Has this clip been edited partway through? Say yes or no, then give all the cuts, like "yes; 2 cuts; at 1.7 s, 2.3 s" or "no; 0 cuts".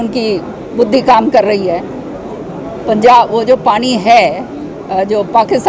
no; 0 cuts